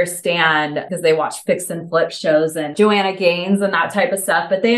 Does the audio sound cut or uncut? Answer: uncut